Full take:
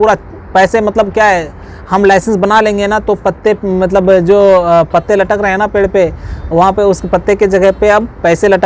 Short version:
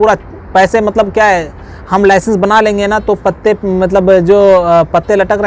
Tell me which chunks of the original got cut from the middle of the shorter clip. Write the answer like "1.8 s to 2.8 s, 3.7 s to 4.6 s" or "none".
none